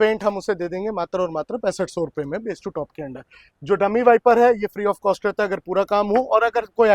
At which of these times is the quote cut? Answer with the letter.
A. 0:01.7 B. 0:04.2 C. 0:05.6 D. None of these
D